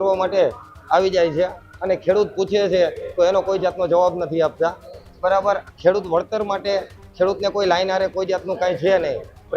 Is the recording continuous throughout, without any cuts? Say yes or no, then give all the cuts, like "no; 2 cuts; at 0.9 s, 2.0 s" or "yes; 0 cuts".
yes; 0 cuts